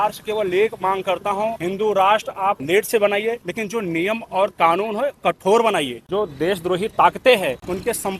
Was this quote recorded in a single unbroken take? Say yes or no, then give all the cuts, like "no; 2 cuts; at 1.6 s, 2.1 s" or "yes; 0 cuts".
no; 3 cuts; at 1.6 s, 2.6 s, 3.5 s